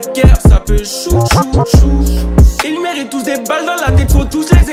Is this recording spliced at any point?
no; 0 cuts

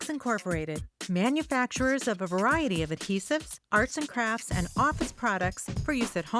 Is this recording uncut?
yes; 0 cuts

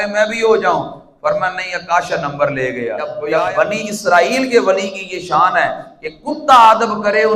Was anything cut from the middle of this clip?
yes; 1 cut; at 3.2 s

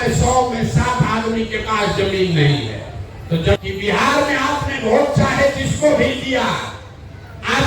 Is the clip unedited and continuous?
no; 1 cut; at 3.6 s

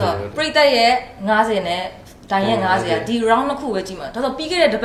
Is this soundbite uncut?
yes; 0 cuts

